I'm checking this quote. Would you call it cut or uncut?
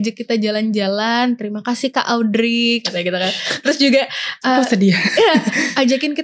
uncut